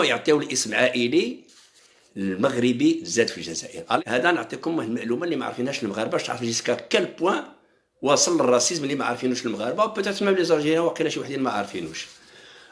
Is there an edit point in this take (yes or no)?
yes